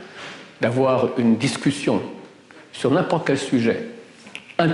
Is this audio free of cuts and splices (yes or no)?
yes